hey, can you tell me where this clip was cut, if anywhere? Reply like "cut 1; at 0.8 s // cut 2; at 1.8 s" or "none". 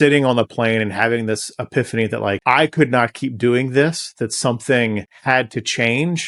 none